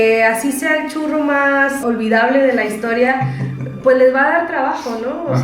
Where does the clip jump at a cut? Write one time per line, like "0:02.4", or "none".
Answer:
0:01.8

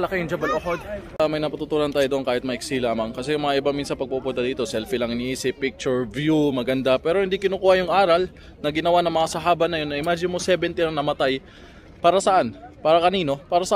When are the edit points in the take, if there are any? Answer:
0:01.0

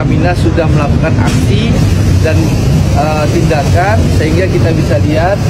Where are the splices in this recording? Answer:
none

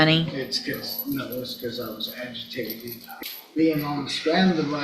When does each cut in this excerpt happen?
0:03.1

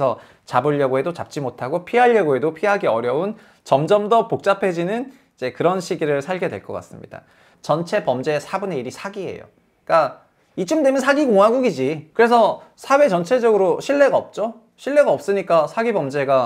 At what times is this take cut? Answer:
0:07.5
0:12.0

